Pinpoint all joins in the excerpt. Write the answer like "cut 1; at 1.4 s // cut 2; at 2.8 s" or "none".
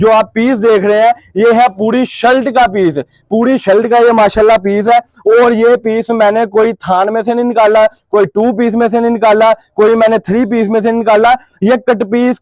none